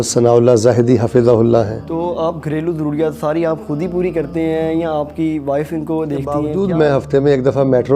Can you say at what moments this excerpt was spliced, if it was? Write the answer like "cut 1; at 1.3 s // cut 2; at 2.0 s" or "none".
cut 1; at 1.8 s // cut 2; at 6.5 s